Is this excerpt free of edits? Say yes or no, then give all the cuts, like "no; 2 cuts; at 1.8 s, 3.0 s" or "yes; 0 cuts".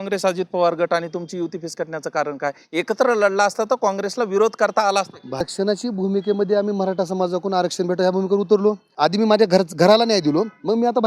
no; 2 cuts; at 5.5 s, 8.9 s